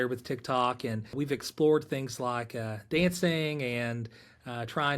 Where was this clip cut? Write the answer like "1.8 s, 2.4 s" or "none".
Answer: 1.1 s